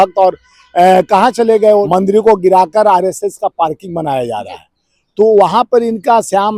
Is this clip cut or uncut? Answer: cut